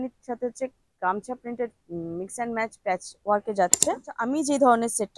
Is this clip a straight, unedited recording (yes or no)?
no